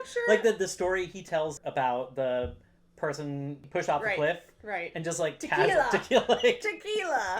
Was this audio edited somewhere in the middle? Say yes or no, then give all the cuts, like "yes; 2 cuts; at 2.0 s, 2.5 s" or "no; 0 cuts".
yes; 2 cuts; at 1.6 s, 3.6 s